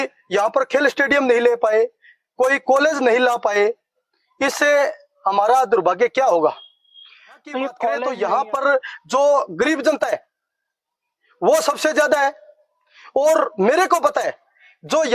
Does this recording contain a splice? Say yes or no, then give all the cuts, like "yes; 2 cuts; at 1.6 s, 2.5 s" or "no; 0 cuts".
yes; 1 cut; at 8.1 s